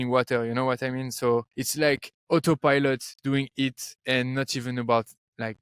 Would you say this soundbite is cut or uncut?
cut